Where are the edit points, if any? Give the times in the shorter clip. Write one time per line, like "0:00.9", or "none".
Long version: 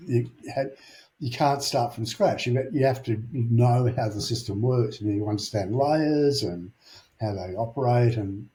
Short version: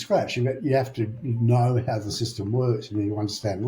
none